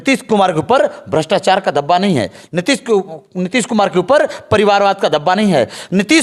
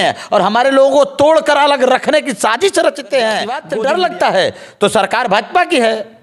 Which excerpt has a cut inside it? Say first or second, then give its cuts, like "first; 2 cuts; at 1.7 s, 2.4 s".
second; 1 cut; at 3.6 s